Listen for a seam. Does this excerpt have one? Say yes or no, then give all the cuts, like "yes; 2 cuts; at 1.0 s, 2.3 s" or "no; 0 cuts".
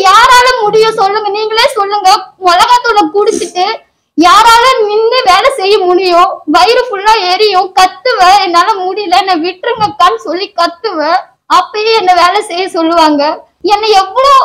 yes; 2 cuts; at 11.3 s, 13.5 s